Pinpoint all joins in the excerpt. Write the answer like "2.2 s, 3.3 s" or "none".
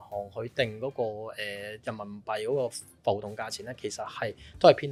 none